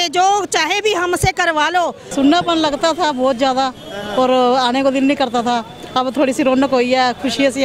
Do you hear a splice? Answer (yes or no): yes